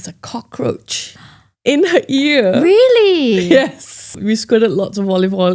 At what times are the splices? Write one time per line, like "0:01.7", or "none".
0:04.2